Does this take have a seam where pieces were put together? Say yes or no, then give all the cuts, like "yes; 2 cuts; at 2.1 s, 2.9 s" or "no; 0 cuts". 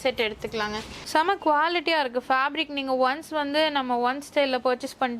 yes; 1 cut; at 1.0 s